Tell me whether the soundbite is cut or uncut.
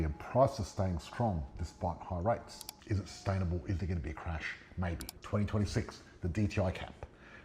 cut